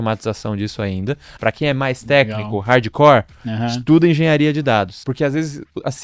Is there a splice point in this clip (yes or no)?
yes